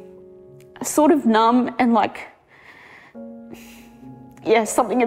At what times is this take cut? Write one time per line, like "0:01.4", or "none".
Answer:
none